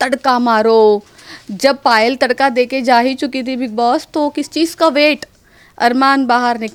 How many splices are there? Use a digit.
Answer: 0